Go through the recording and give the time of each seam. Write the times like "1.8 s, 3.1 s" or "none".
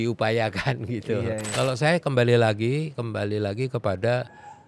1.5 s